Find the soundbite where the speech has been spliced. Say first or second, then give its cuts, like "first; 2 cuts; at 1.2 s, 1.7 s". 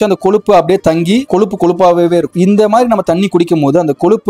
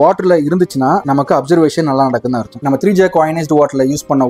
second; 1 cut; at 2.6 s